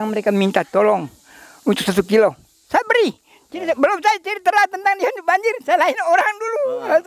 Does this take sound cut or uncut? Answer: uncut